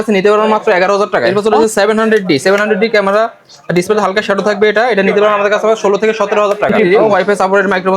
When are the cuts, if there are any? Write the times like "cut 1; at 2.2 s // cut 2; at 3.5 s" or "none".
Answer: cut 1; at 1.3 s // cut 2; at 6.7 s